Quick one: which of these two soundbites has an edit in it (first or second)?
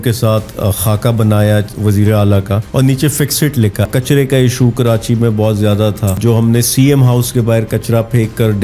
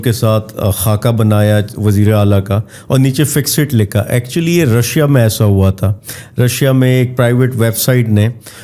first